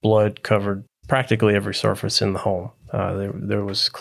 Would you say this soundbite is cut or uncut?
cut